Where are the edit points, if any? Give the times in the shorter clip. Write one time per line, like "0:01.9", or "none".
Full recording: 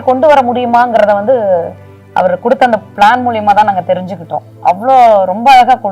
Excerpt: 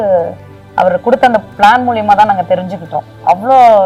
none

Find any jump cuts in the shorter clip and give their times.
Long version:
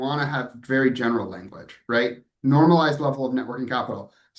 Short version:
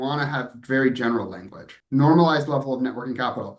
0:01.7

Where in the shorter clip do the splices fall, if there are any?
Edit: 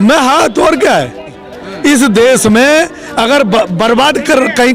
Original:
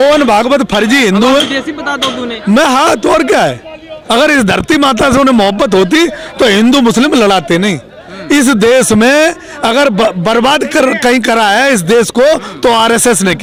0:01.4

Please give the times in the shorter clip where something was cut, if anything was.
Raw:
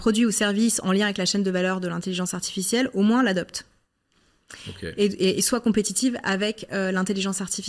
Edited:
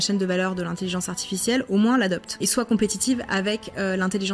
0:02.4

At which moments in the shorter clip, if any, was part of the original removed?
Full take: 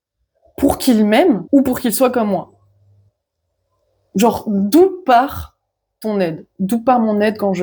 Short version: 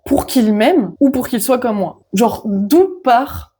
0:02.0

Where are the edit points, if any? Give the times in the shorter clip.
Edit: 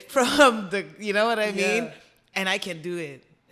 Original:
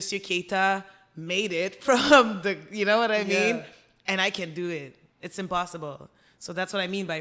none

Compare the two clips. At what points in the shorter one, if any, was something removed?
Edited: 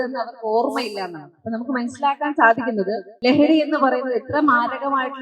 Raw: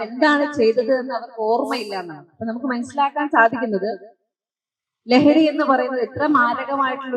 0:03.1

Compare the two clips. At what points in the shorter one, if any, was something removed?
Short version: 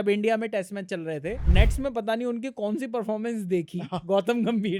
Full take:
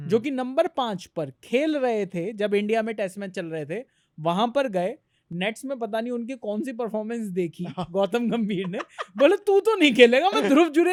0:01.4

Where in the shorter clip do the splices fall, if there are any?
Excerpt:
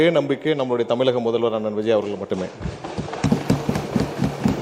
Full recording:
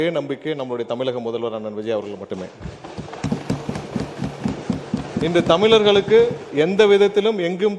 none

